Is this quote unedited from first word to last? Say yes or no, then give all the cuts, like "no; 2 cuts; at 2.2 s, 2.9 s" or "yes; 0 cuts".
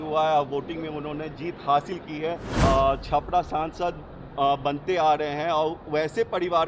no; 1 cut; at 2.5 s